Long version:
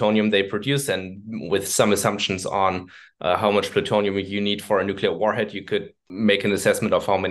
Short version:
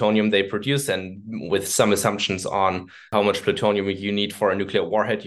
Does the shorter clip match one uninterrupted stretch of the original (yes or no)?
no